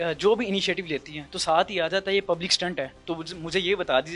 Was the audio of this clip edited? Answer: no; 0 cuts

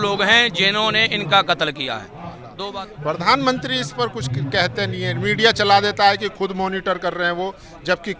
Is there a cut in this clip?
yes; 1 cut; at 2.5 s

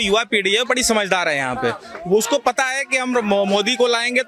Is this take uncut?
yes; 0 cuts

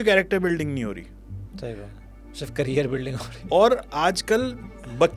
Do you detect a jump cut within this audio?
no; 0 cuts

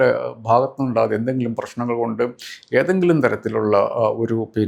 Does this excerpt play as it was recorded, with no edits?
yes; 0 cuts

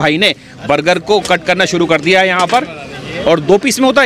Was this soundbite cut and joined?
no; 0 cuts

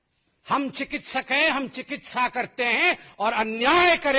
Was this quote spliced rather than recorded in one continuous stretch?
no; 0 cuts

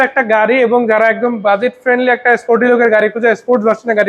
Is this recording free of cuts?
yes; 0 cuts

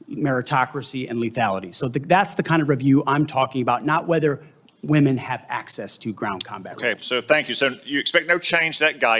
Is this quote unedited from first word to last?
yes; 0 cuts

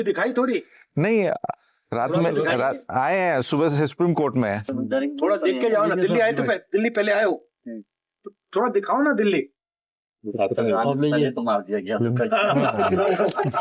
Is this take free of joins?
yes; 0 cuts

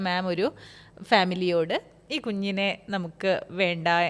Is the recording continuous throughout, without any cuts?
yes; 0 cuts

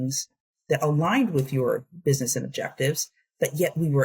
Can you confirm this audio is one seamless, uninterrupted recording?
yes; 0 cuts

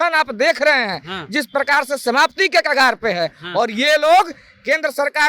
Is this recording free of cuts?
yes; 0 cuts

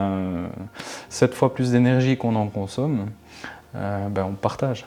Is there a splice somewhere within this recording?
no; 0 cuts

